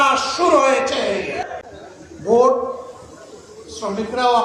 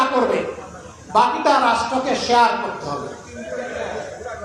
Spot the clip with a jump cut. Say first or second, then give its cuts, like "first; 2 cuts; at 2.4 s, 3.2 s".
first; 1 cut; at 1.6 s